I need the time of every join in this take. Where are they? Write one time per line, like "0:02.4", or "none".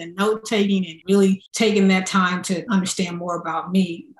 0:00.9
0:01.5
0:02.7